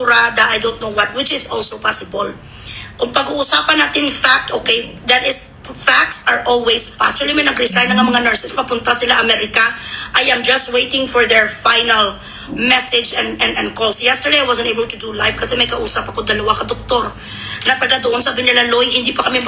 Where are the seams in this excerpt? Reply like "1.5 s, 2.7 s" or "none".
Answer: 7.5 s